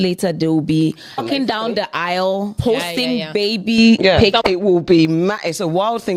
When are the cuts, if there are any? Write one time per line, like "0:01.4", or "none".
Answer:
0:01.2
0:02.6
0:04.4